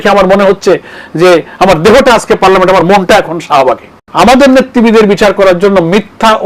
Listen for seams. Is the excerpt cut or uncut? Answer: cut